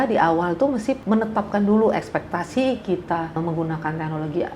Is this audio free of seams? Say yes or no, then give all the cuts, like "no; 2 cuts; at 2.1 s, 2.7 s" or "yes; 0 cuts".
no; 2 cuts; at 1.0 s, 3.4 s